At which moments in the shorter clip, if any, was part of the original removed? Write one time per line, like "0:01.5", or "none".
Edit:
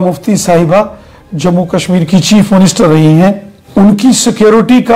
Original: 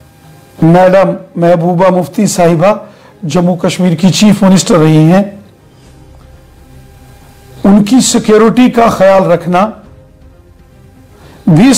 0:03.5